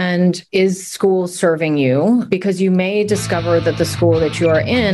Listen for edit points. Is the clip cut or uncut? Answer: uncut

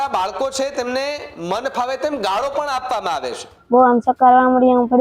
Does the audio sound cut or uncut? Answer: cut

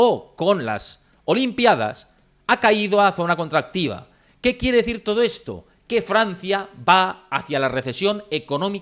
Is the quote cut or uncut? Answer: uncut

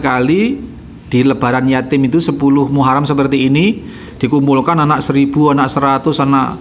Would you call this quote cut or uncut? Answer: uncut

